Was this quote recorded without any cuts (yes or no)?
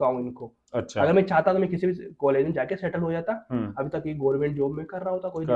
yes